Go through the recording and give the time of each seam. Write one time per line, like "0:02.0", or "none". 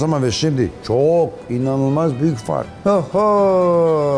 0:02.7